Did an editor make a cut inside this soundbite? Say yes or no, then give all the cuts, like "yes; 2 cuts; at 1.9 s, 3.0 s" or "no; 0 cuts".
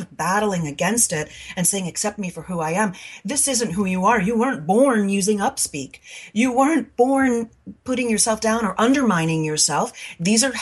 no; 0 cuts